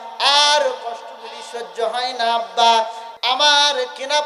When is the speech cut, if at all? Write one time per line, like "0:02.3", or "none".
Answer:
0:03.1

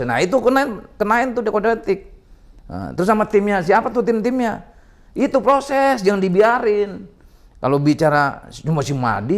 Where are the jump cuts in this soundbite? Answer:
none

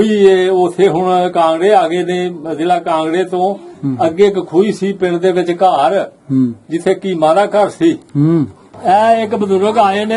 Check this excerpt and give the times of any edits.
0:08.6

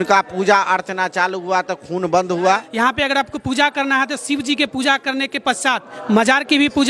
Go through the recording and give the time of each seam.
0:02.7
0:05.9

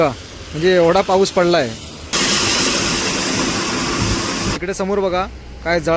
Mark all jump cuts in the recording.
0:02.1
0:04.6

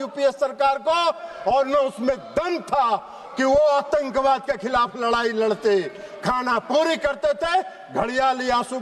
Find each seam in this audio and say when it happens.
none

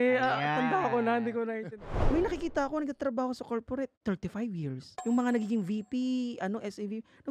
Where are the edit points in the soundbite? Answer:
0:01.9

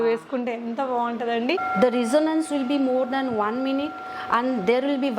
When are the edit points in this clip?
0:01.6

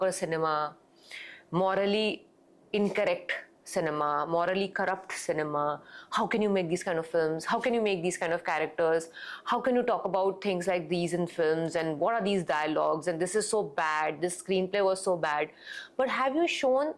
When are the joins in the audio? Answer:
none

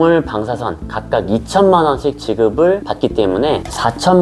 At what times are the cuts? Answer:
none

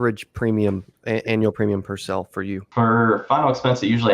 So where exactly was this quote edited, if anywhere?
0:02.6

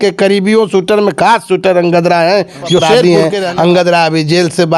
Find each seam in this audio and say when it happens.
0:03.0

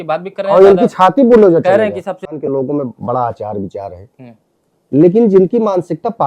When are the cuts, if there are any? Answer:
0:02.3

